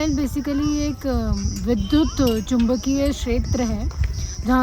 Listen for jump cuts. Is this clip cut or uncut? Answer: uncut